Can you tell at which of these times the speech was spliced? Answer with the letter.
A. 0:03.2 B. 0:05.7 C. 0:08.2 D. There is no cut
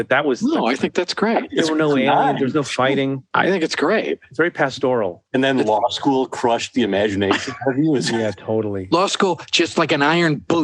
A